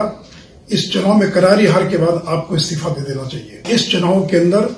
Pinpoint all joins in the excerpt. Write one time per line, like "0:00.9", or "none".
0:03.6